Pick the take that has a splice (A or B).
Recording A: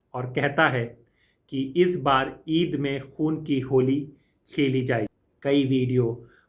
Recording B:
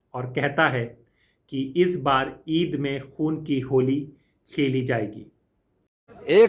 A